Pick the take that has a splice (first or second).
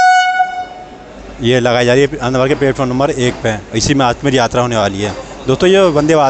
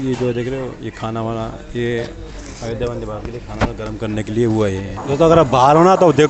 second